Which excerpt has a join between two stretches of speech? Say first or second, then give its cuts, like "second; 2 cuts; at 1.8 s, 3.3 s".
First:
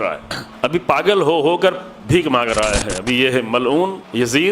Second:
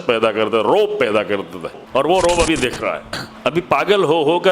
second; 1 cut; at 1.8 s